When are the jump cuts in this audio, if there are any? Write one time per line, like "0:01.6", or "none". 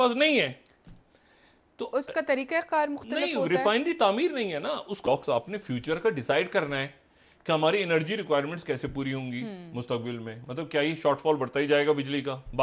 0:04.9